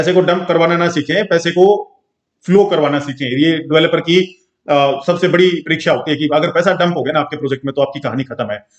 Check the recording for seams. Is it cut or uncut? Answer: uncut